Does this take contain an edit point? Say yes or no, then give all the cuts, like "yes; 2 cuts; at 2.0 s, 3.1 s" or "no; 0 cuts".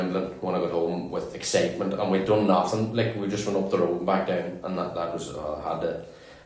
no; 0 cuts